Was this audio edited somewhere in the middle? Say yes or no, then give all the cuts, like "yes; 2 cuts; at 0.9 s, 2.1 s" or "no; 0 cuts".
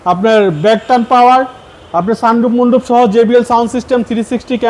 no; 0 cuts